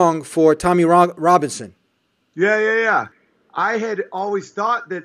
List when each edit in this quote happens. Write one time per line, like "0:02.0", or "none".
0:03.1